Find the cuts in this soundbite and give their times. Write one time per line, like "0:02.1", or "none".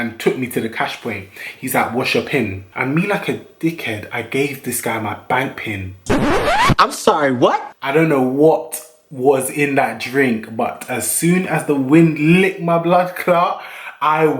0:02.6
0:07.7